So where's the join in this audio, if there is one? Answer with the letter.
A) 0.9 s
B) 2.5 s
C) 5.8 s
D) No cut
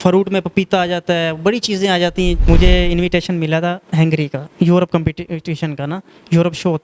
B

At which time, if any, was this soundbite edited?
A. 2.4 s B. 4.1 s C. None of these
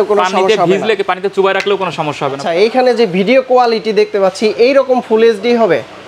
A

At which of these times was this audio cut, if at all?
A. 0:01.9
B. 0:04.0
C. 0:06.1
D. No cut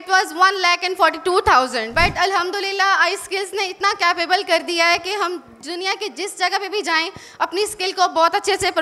A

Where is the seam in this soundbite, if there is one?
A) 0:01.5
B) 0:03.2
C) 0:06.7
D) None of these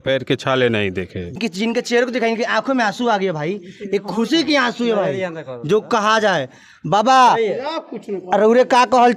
A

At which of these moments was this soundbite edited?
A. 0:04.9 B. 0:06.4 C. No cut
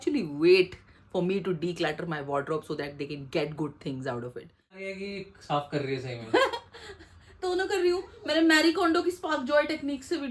A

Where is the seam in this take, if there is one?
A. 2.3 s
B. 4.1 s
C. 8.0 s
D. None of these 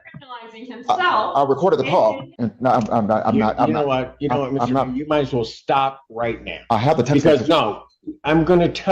A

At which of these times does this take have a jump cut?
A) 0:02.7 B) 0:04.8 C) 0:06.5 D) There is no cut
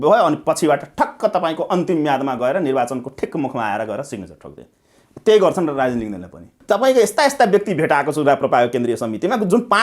C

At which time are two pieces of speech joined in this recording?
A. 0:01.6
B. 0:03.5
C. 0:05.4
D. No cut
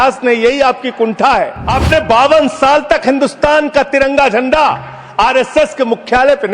A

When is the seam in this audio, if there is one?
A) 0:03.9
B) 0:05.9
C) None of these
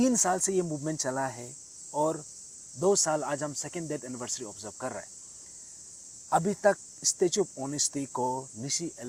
C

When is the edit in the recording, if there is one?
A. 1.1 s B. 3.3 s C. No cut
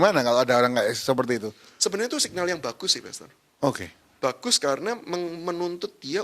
C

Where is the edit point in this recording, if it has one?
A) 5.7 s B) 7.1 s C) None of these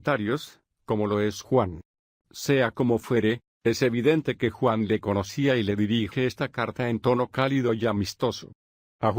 C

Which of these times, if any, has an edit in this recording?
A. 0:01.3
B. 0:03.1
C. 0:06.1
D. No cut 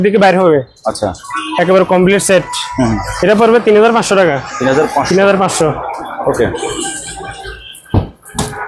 D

